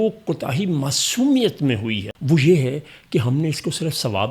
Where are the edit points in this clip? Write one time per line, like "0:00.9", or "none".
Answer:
0:02.1